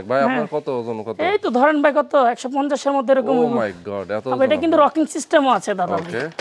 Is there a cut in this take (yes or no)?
no